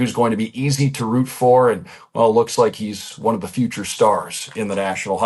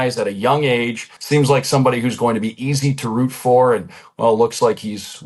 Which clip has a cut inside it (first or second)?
second